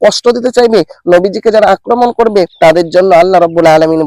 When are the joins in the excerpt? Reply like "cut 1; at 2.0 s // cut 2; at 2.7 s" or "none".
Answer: cut 1; at 2.5 s

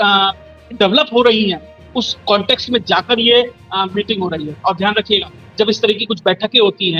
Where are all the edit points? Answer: none

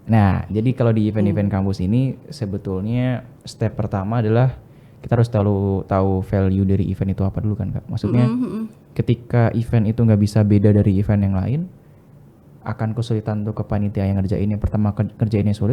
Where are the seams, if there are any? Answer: none

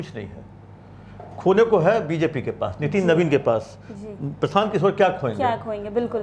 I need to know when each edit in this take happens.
none

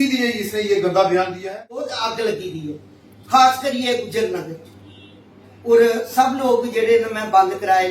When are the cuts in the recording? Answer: cut 1; at 1.4 s

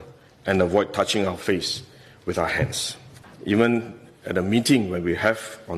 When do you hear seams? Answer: cut 1; at 3.3 s

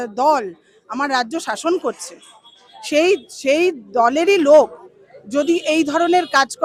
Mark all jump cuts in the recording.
none

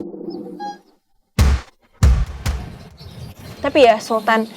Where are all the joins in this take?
cut 1; at 2.5 s

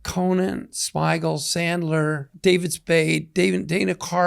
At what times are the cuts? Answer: cut 1; at 2.3 s

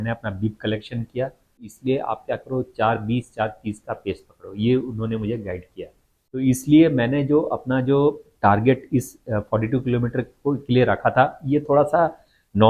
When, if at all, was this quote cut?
cut 1; at 1.7 s // cut 2; at 6.4 s

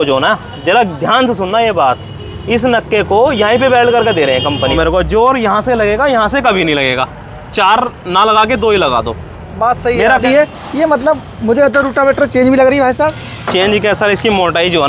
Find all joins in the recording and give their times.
cut 1; at 4.7 s // cut 2; at 10.2 s

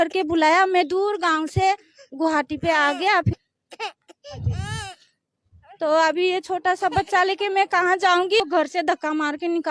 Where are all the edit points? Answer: cut 1; at 3.4 s // cut 2; at 8.4 s

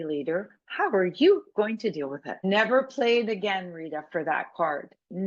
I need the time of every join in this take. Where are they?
cut 1; at 2.4 s

